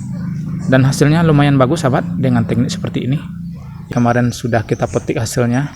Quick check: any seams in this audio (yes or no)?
yes